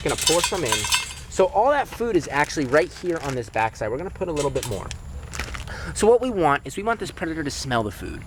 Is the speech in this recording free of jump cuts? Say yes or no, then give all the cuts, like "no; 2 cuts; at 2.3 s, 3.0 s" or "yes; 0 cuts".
yes; 0 cuts